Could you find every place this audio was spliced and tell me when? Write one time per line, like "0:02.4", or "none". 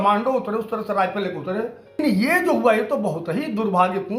0:02.0